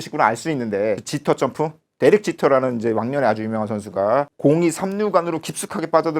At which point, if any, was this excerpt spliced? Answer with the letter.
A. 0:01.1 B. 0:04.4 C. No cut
A